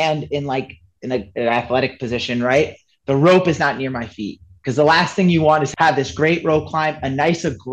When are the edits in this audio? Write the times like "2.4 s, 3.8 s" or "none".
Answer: 5.7 s